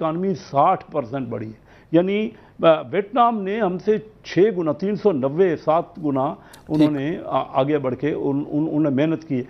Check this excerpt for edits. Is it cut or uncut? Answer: uncut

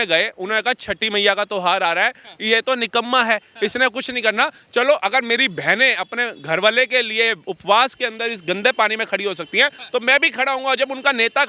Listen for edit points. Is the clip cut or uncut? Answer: uncut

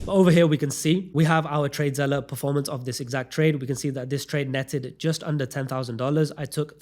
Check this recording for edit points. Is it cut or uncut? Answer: cut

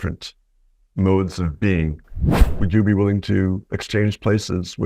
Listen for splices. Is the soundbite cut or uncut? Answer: cut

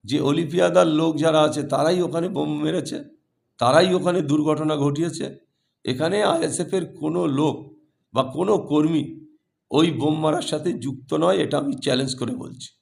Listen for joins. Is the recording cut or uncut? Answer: uncut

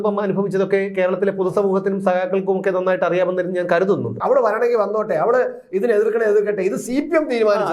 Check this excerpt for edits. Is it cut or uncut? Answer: cut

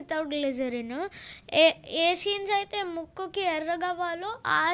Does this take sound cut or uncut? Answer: uncut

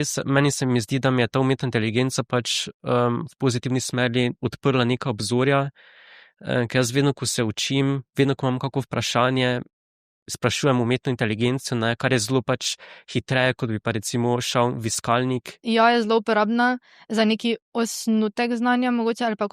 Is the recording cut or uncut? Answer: cut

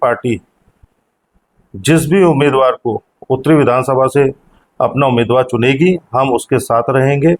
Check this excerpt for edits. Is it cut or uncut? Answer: uncut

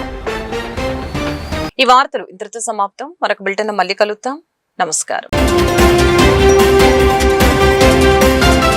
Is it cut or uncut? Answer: uncut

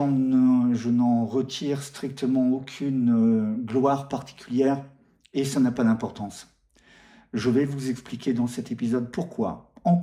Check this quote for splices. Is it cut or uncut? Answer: uncut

